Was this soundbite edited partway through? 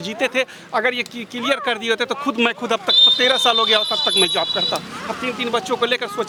no; 0 cuts

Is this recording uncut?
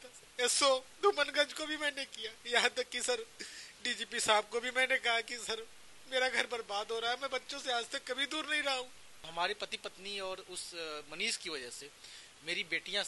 no; 1 cut; at 9.3 s

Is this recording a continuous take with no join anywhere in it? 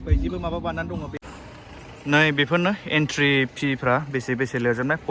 no; 1 cut; at 1.1 s

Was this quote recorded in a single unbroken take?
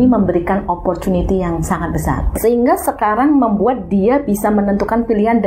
no; 1 cut; at 2.3 s

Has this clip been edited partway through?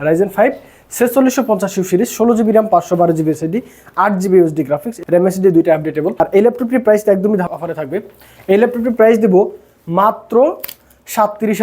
yes; 2 cuts; at 6.1 s, 7.5 s

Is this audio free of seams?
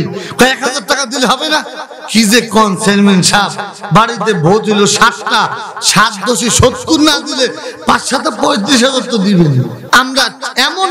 no; 1 cut; at 9.8 s

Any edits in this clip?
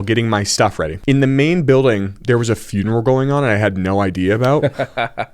yes; 1 cut; at 1.0 s

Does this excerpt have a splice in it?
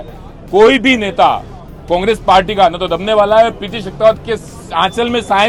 no; 0 cuts

